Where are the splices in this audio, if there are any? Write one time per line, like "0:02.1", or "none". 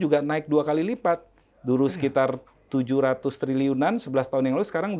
none